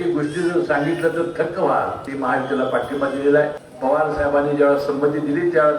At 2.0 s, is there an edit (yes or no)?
yes